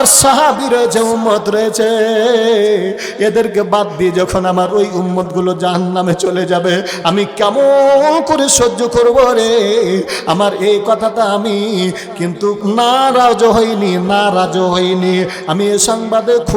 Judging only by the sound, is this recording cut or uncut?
cut